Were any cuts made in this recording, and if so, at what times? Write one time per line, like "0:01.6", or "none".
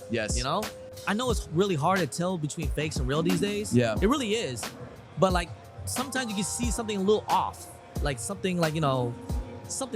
0:00.9